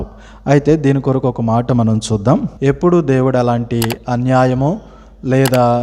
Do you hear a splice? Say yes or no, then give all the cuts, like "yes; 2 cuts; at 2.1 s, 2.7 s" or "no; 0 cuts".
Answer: yes; 1 cut; at 2.5 s